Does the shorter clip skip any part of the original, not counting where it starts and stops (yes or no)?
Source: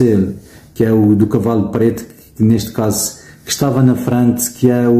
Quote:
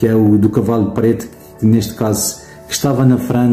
no